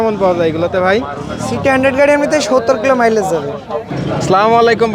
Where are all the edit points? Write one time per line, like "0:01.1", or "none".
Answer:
none